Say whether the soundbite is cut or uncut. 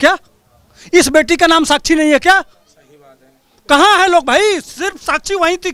uncut